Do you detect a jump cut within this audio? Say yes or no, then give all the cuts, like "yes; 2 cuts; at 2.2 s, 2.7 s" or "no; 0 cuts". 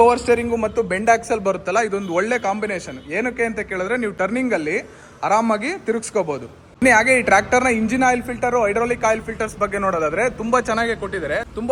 no; 0 cuts